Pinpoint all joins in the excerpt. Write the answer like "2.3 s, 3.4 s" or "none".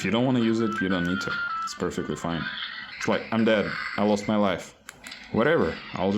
2.9 s

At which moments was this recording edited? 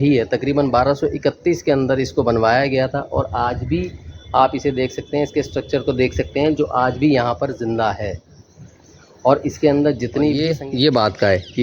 10.3 s

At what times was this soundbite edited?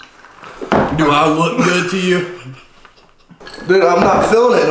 none

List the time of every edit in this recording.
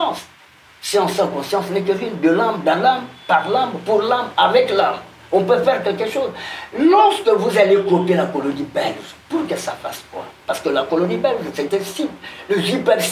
none

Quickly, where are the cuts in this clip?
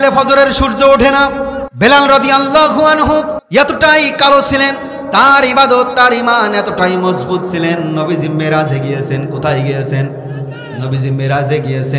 1.6 s, 3.4 s

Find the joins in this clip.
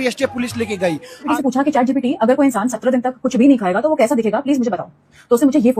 1.3 s

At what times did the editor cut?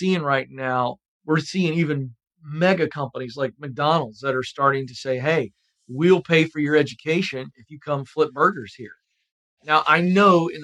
1.1 s

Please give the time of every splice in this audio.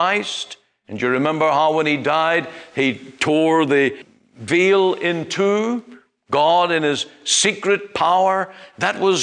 4.1 s

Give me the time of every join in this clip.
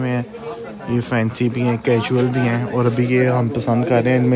none

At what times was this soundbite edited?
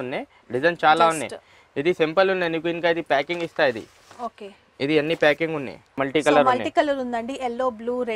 6.0 s

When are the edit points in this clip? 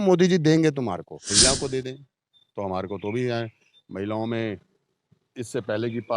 1.2 s

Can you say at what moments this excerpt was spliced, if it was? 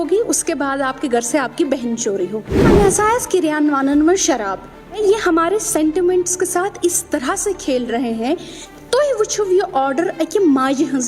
2.6 s, 5.0 s, 8.6 s

